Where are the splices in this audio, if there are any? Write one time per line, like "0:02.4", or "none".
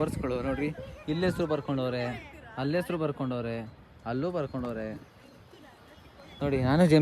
none

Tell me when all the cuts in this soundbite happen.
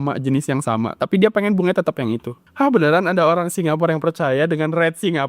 0:02.3

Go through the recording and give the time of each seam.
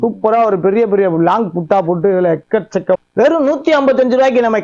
0:03.0

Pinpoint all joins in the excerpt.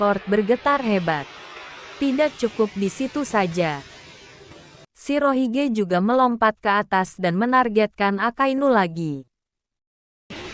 none

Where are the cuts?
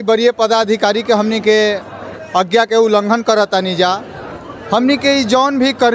none

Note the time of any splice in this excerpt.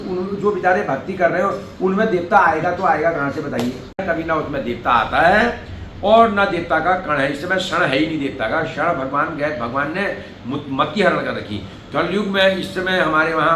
0:04.0

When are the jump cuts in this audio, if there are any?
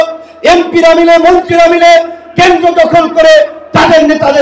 none

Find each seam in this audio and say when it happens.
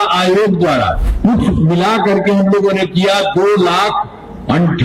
0:01.0

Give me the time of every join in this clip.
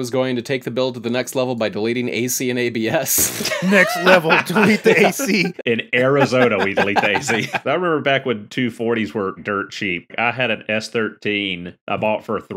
0:03.6
0:05.5
0:07.6
0:09.4

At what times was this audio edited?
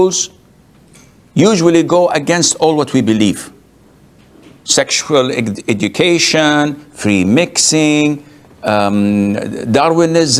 none

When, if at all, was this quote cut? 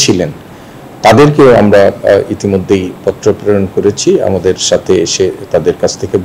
none

